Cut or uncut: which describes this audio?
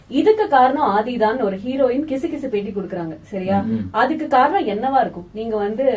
uncut